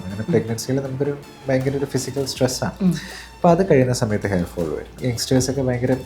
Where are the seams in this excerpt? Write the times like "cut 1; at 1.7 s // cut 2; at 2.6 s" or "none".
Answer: cut 1; at 4.9 s